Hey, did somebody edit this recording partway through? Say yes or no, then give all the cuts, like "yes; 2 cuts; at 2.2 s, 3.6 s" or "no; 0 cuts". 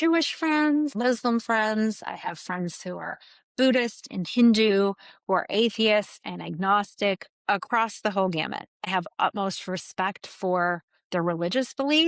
yes; 1 cut; at 0.9 s